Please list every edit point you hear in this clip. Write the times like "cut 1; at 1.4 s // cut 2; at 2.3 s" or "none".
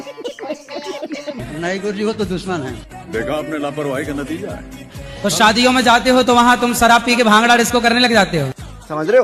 none